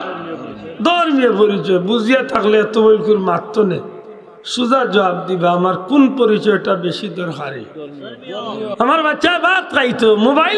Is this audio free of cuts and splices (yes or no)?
no